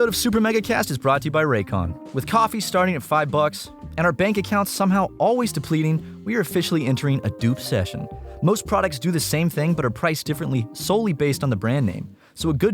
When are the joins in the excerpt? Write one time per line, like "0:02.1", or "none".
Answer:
0:02.0
0:03.7